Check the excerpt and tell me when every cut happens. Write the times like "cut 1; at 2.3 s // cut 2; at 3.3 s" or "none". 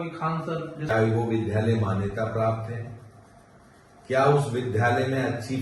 cut 1; at 0.9 s